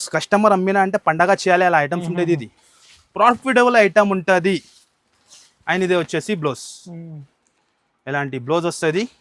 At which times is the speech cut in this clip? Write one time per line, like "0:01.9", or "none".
none